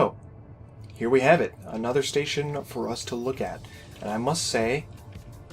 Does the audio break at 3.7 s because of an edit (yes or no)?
no